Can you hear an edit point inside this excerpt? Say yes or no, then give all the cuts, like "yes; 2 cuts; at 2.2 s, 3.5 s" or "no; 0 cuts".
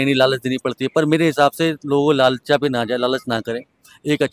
no; 0 cuts